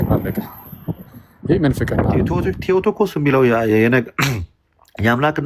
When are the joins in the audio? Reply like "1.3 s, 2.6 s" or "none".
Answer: 2.4 s